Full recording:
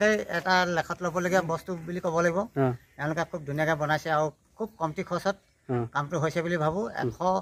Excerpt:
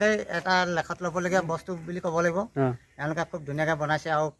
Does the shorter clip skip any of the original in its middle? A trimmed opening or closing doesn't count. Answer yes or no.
no